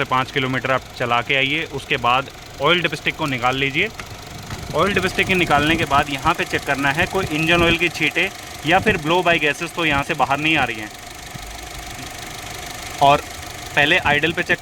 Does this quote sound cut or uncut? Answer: uncut